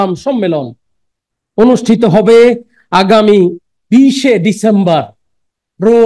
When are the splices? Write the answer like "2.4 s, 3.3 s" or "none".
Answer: none